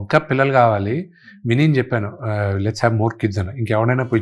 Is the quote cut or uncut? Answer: uncut